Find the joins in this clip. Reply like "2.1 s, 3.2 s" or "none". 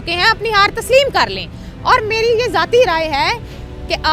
none